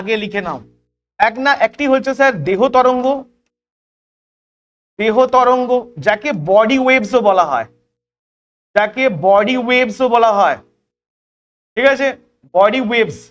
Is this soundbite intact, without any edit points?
yes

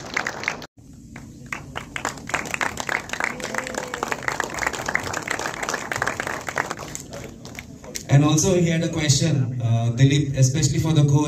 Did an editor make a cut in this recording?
no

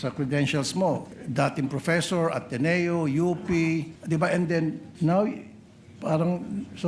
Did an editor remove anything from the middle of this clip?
yes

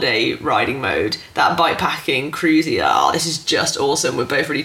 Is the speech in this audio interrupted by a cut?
no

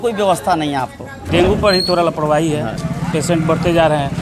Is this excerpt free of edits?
no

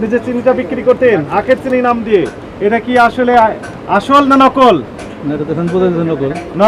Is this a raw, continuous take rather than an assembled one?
yes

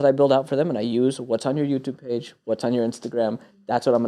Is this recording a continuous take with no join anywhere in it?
yes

